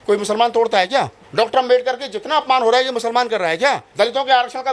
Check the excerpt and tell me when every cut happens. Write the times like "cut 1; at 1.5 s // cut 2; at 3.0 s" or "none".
cut 1; at 1.2 s // cut 2; at 3.9 s